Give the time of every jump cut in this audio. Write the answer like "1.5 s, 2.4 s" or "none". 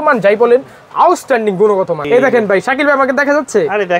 2.0 s